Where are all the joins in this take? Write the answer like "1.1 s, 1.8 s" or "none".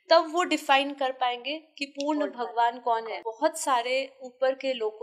3.2 s